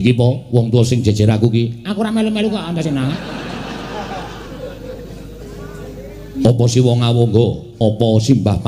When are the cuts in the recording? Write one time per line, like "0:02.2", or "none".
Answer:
0:03.7